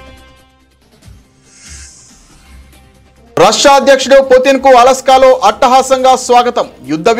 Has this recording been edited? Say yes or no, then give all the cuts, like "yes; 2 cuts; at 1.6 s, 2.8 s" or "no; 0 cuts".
yes; 2 cuts; at 1.7 s, 2.8 s